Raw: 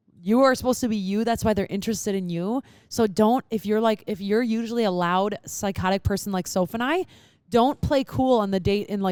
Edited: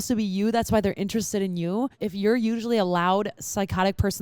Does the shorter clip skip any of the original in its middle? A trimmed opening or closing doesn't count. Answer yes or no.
yes